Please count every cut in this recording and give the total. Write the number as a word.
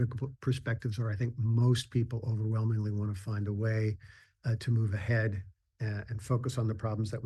zero